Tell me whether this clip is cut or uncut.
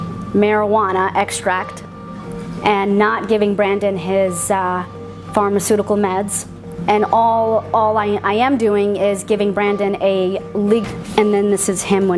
uncut